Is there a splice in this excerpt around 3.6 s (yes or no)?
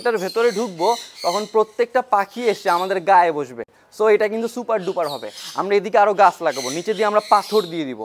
no